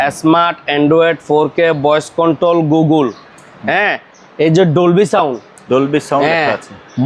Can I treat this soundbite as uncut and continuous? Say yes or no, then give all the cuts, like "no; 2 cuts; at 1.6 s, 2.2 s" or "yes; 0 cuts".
yes; 0 cuts